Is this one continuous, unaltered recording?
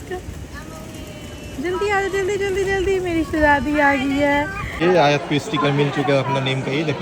no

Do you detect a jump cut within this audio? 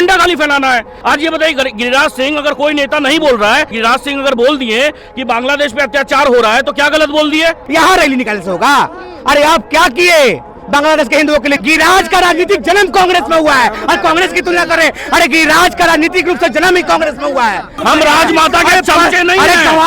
yes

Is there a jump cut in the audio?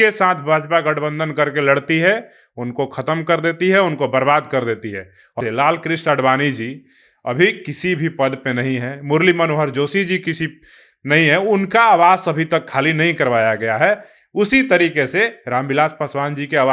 yes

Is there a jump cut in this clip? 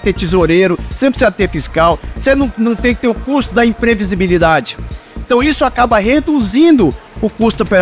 yes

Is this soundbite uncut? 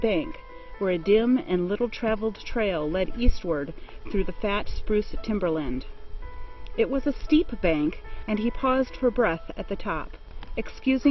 no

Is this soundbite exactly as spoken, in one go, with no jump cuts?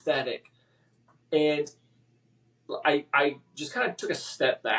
yes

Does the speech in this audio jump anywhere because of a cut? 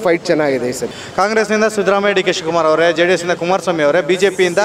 yes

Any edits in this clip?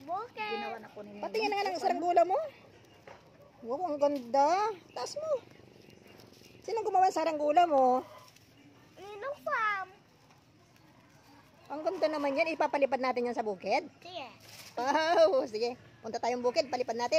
yes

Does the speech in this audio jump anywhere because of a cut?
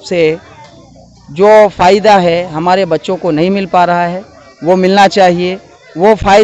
no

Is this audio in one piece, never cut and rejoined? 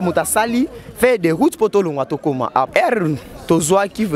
no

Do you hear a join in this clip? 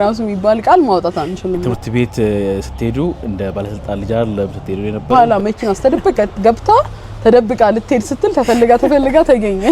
yes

